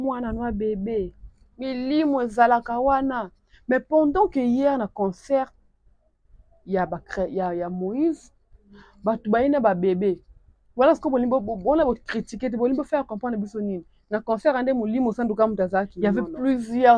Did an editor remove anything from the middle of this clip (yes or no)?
yes